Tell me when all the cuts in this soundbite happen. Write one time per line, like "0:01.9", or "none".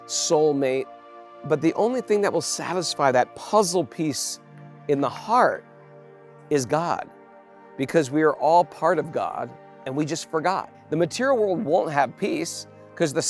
0:10.7

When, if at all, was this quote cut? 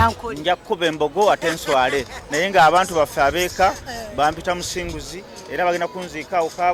none

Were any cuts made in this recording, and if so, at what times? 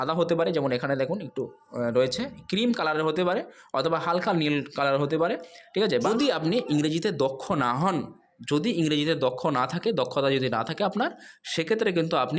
0:06.1

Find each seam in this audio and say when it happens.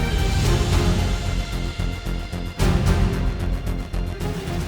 0:03.1

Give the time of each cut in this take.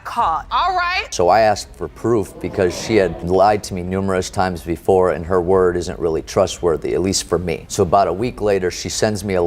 0:01.1

